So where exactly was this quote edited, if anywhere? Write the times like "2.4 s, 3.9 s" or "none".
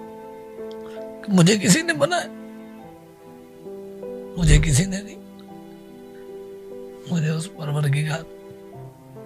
8.2 s